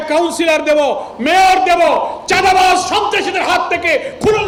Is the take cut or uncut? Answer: uncut